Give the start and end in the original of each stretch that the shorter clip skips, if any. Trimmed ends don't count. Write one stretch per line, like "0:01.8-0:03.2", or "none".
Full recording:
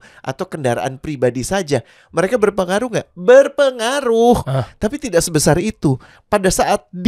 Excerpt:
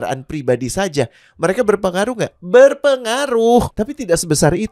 0:04.4-0:04.7